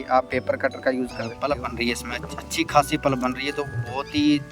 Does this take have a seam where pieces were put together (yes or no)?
yes